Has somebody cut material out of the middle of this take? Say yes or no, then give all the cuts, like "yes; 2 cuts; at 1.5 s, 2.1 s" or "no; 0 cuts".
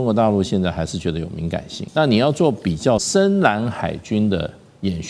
yes; 2 cuts; at 1.8 s, 3.1 s